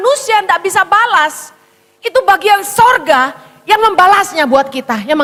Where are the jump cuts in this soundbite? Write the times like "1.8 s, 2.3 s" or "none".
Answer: none